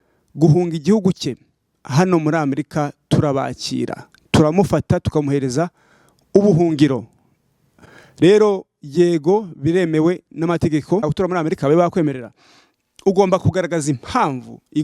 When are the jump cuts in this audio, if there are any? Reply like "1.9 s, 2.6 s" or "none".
11.0 s